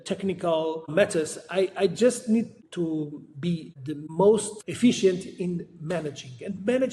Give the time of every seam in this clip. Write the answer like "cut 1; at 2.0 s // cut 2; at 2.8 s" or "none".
none